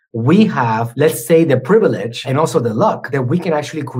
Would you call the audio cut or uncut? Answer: cut